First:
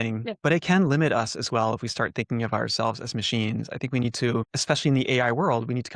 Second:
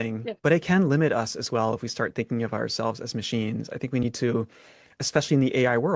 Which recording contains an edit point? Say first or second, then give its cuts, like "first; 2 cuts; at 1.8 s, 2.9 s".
first; 1 cut; at 4.5 s